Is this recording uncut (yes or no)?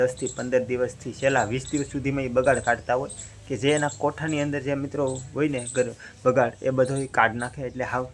yes